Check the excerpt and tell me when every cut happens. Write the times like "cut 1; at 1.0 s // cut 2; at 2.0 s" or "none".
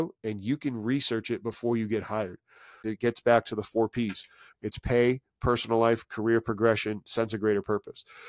cut 1; at 2.9 s // cut 2; at 4.4 s